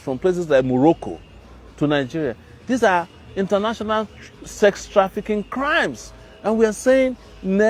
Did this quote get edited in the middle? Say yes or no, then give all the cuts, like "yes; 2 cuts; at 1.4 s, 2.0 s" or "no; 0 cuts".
no; 0 cuts